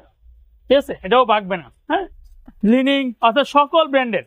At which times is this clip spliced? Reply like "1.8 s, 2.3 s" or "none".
2.2 s